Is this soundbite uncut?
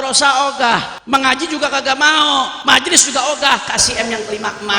no; 2 cuts; at 0.9 s, 2.6 s

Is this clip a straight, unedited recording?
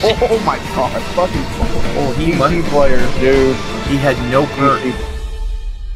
no; 1 cut; at 5.0 s

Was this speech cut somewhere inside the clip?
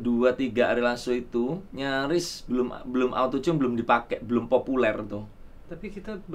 yes; 1 cut; at 1.7 s

